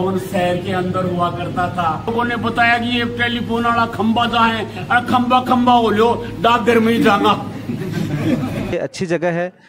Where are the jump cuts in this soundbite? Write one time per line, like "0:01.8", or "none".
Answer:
0:02.1
0:08.7